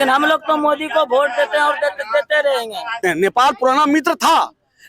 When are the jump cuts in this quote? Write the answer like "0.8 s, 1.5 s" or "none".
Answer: 3.0 s